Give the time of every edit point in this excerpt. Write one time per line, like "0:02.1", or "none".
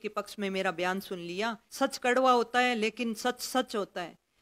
0:01.6